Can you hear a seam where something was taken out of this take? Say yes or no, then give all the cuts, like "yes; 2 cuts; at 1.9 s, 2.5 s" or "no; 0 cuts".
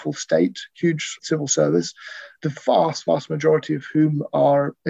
yes; 2 cuts; at 1.2 s, 2.2 s